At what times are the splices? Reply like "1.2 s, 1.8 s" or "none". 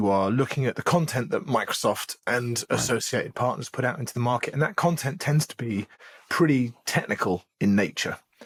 none